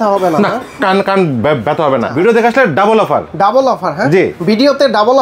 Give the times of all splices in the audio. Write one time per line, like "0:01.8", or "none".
0:02.1